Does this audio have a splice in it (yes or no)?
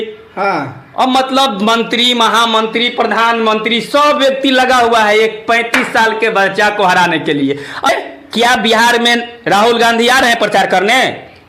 yes